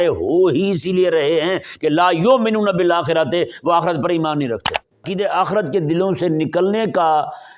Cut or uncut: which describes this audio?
cut